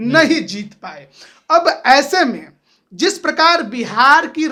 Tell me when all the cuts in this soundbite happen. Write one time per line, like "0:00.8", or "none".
none